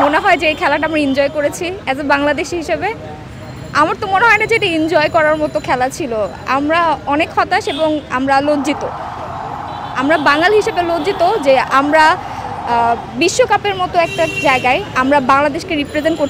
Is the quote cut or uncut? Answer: uncut